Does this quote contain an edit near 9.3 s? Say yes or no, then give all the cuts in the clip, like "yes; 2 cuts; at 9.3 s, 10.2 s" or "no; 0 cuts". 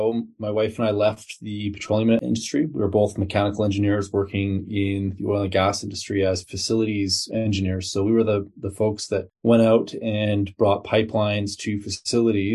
yes; 2 cuts; at 2.2 s, 9.3 s